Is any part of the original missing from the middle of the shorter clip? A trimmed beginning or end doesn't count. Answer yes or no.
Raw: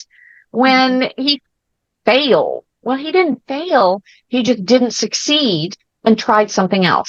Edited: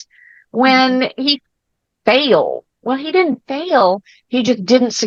no